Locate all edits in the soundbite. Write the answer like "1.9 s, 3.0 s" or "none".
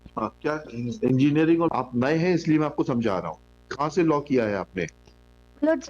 1.7 s

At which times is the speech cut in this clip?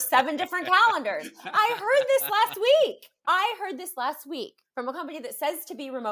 3.1 s, 4.6 s

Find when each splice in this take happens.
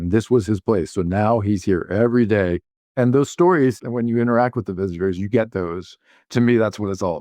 2.9 s, 3.8 s, 6.3 s

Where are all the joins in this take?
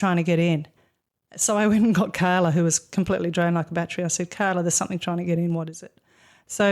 none

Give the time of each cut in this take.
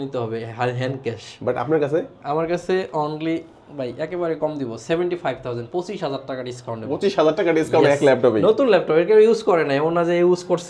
none

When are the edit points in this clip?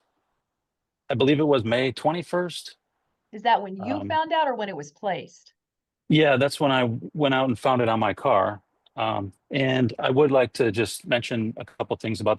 none

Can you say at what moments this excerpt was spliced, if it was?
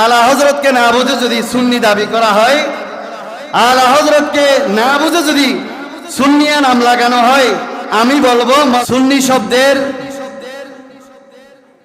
8.8 s

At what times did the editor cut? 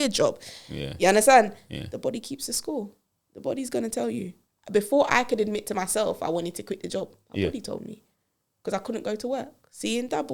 none

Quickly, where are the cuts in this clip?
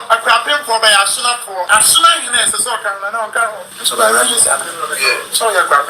1.7 s, 3.7 s

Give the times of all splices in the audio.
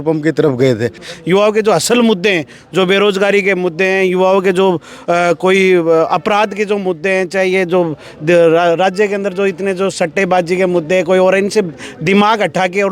1.0 s

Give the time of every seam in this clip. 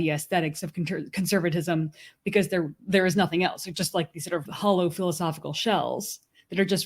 4.5 s

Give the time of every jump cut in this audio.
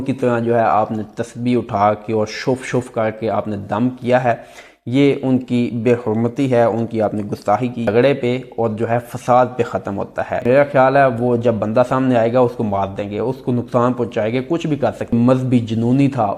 7.9 s, 10.4 s, 15.1 s

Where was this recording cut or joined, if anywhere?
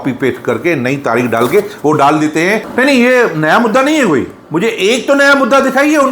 2.7 s

